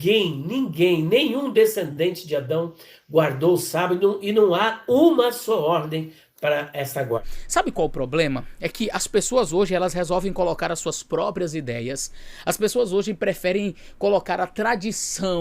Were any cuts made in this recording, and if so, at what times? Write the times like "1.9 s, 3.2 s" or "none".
7.3 s